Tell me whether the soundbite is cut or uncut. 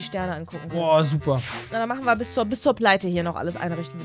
cut